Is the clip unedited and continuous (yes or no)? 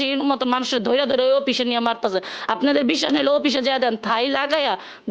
yes